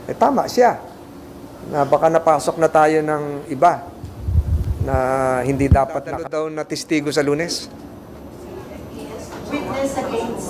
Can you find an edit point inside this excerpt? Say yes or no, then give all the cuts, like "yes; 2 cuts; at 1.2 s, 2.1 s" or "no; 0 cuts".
yes; 1 cut; at 6.2 s